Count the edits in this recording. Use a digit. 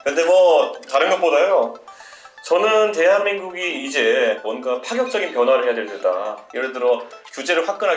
2